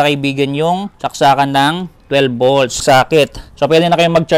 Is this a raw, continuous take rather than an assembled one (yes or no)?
no